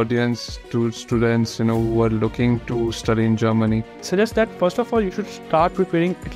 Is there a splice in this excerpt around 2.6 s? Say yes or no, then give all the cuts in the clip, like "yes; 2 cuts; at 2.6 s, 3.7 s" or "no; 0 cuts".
no; 1 cut; at 4.0 s